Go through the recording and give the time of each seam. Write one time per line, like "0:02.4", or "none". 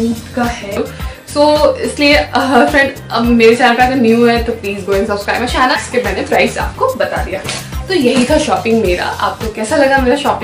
0:00.8
0:05.8